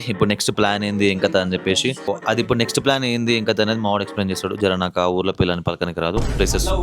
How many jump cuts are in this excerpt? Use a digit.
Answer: 1